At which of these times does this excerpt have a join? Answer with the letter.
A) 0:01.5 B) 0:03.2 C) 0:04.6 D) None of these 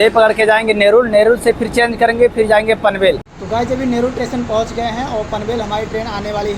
B